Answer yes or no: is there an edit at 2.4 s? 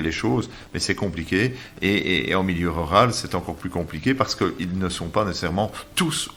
no